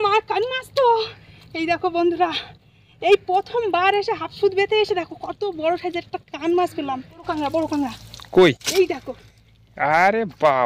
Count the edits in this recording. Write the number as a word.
one